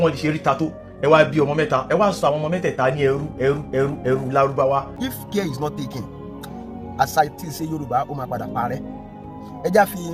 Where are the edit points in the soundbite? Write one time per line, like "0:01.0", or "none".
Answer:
0:05.0